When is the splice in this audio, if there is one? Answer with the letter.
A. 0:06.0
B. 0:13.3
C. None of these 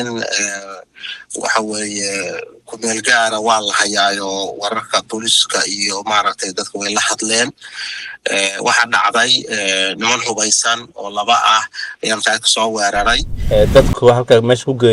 B